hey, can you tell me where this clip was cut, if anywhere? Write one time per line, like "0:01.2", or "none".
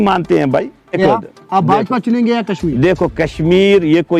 0:01.0